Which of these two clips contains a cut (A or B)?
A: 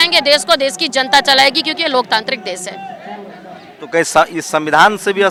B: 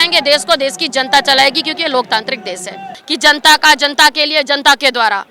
B